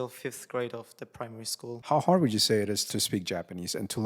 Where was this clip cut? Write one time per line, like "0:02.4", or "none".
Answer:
0:01.8
0:02.8